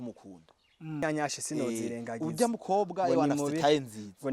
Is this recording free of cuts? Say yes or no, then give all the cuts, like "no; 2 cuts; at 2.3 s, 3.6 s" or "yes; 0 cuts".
no; 1 cut; at 1.0 s